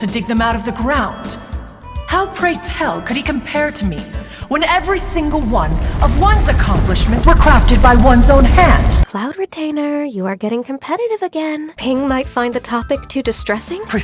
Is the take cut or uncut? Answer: cut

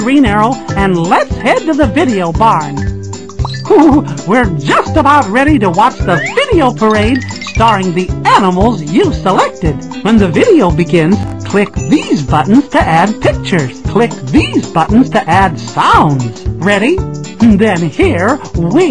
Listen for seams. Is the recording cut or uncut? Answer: cut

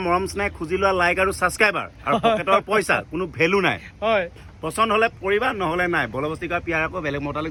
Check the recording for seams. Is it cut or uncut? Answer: uncut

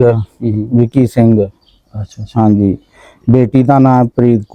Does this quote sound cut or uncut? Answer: uncut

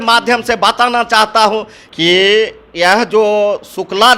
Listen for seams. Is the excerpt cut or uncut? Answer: cut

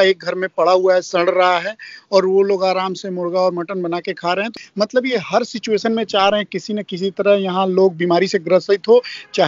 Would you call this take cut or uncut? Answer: cut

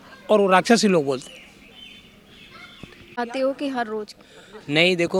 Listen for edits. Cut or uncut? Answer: uncut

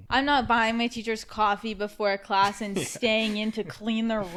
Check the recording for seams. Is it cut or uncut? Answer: uncut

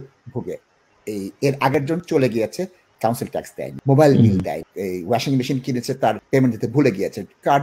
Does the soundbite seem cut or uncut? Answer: cut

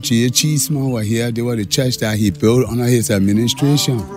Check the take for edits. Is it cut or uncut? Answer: uncut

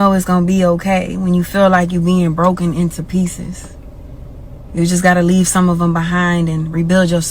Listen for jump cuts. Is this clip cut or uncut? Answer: uncut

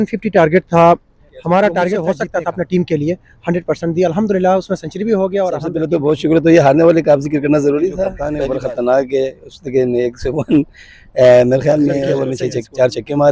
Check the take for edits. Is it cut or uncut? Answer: cut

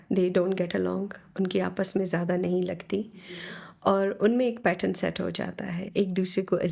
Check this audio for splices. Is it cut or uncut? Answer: uncut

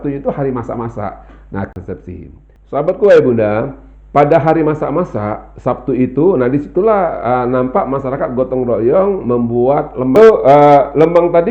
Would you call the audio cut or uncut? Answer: cut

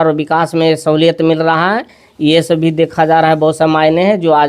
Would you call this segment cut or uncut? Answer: uncut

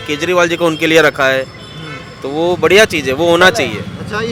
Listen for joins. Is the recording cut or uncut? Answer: uncut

